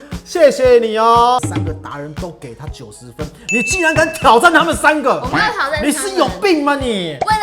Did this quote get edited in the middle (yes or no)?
yes